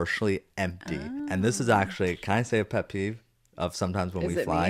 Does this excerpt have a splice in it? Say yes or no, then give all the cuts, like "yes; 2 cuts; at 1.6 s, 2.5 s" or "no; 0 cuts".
yes; 1 cut; at 1.1 s